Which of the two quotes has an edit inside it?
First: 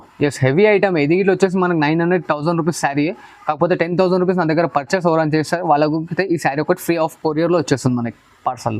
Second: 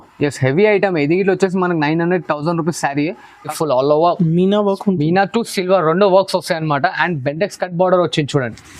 second; 1 cut; at 3.4 s

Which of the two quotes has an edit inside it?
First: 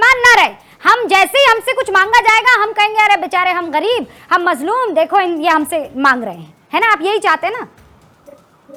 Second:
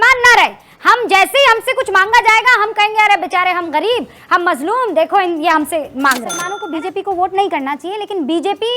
second; 1 cut; at 6.4 s

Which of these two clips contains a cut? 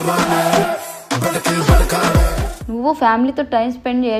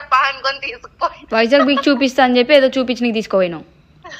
first; 1 cut; at 2.5 s

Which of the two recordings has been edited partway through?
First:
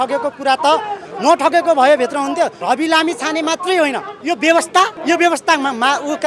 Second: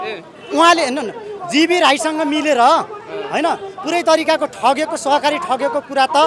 first; 3 cuts; at 2.6 s, 4.1 s, 5.0 s

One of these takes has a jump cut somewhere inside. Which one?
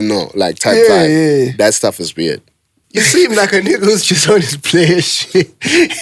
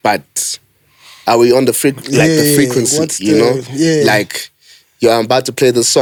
first; 1 cut; at 2.8 s

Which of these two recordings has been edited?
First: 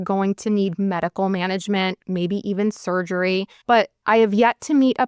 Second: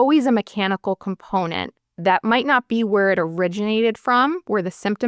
first; 2 cuts; at 2.0 s, 3.7 s

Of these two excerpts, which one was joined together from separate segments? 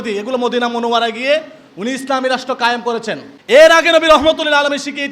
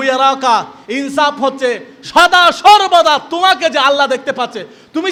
first; 1 cut; at 3.3 s

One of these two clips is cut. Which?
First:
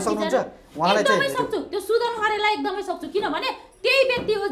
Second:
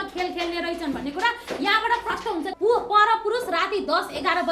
second; 1 cut; at 2.5 s

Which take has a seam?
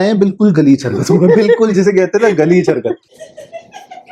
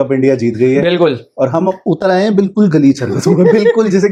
first; 1 cut; at 3.1 s

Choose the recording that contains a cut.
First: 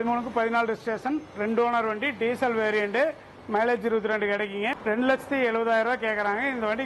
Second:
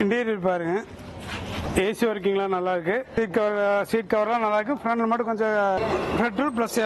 second; 1 cut; at 5.8 s

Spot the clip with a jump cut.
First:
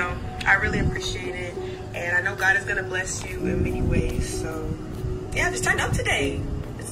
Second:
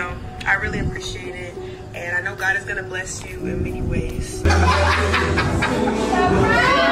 second; 1 cut; at 4.4 s

